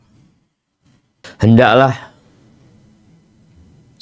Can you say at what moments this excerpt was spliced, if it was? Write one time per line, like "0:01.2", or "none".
0:01.2